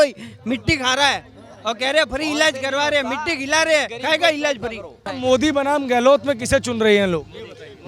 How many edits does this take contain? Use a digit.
1